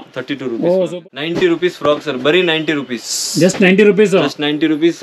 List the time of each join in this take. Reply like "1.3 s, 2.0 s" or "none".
0.9 s